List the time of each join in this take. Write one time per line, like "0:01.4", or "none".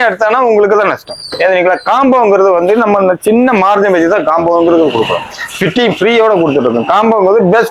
none